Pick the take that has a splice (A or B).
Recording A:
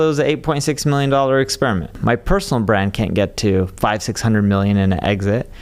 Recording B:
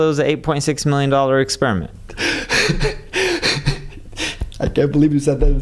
A